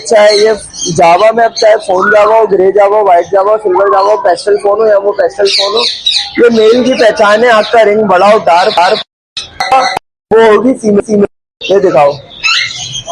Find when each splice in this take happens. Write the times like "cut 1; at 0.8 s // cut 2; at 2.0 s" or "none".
cut 1; at 9.6 s